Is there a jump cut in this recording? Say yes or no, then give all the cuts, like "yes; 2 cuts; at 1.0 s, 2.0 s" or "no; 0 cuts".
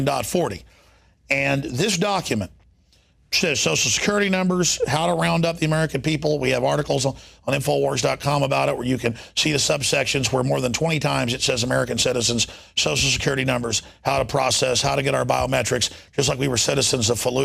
no; 0 cuts